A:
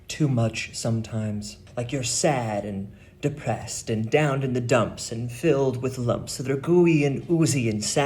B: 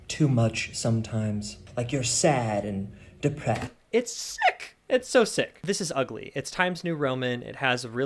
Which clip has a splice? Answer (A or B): A